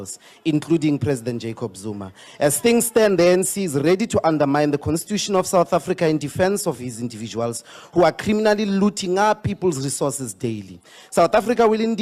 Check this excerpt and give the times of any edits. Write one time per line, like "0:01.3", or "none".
none